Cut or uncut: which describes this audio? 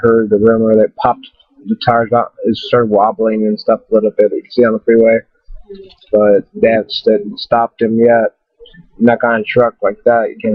cut